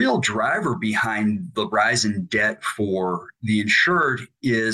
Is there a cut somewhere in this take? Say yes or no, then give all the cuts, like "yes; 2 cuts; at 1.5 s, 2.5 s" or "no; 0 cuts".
yes; 1 cut; at 1.5 s